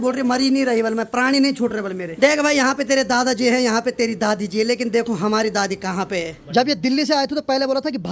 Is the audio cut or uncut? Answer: cut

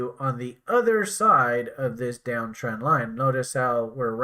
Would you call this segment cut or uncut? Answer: uncut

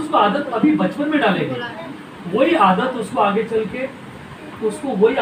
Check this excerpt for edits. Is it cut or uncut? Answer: uncut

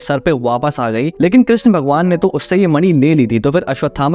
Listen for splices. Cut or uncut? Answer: cut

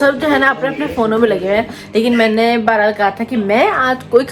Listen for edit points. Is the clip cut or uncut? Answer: uncut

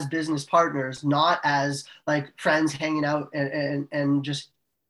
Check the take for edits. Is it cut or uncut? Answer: uncut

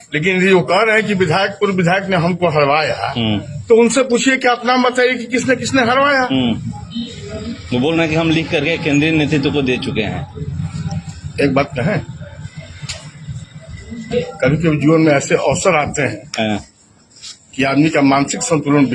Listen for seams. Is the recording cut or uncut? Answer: uncut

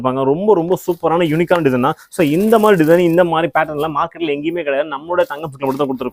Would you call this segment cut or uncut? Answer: uncut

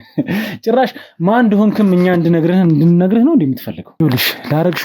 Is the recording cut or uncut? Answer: cut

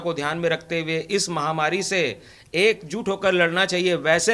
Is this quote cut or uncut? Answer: uncut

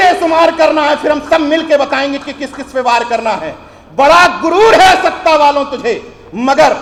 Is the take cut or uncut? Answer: uncut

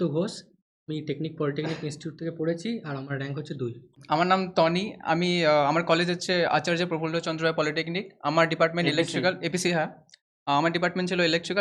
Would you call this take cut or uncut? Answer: cut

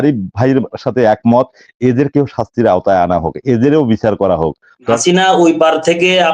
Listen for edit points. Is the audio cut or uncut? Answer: cut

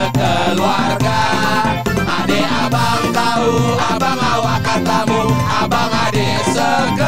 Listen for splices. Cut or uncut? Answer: uncut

